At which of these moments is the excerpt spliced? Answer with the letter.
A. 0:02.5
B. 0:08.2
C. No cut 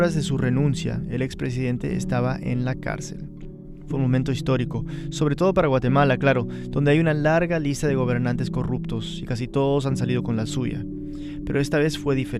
C